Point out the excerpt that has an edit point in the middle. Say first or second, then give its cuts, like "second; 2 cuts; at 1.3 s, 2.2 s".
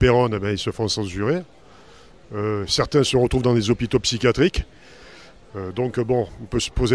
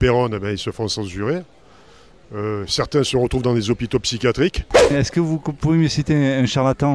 second; 1 cut; at 4.9 s